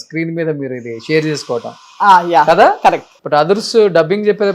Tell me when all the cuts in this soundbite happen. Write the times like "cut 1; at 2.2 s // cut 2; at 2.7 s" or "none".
cut 1; at 3.1 s